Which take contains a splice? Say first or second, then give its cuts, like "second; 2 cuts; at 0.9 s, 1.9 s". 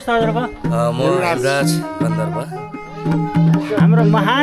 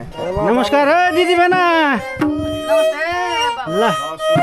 first; 1 cut; at 3.3 s